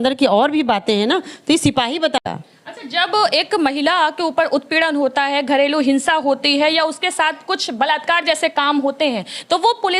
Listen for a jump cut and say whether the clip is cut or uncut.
cut